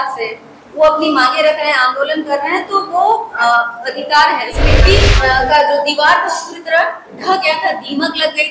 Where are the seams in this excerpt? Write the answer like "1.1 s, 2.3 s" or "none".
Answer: 4.8 s